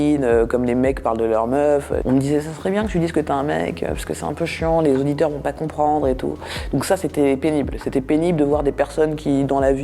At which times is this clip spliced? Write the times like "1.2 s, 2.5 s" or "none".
none

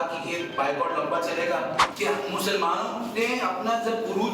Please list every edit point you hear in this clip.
1.9 s

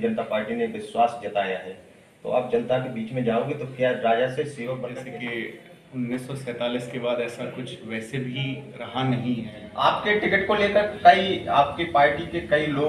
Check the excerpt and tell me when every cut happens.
5.0 s, 9.6 s

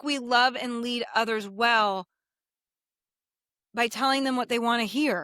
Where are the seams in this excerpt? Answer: none

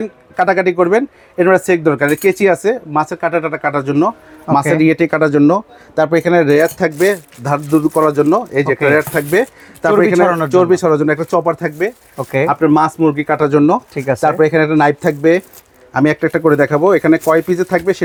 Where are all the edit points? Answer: none

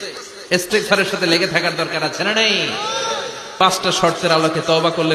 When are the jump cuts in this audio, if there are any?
3.5 s

